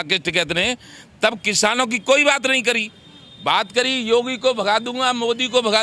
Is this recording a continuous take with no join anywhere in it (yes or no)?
yes